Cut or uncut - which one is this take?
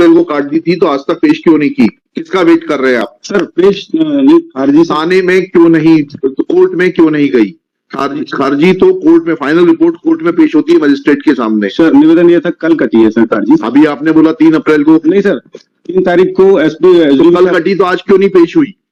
uncut